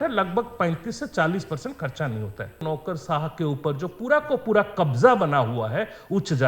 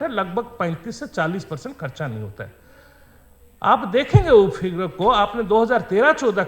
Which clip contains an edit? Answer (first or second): first